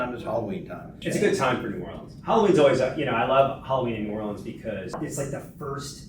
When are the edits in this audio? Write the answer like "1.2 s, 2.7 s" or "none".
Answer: 1.0 s, 4.9 s